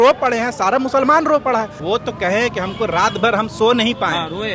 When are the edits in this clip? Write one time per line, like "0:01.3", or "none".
0:01.8